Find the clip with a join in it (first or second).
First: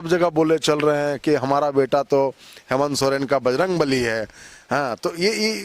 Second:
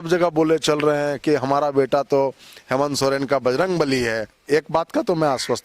second